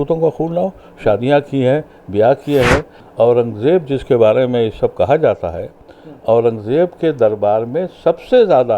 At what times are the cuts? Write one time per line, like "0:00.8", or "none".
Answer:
0:03.0